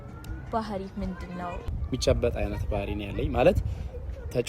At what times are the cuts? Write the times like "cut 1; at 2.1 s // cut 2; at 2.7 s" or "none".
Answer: cut 1; at 1.6 s